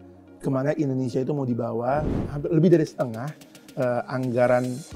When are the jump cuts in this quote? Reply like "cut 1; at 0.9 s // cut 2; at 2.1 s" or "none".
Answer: cut 1; at 2.1 s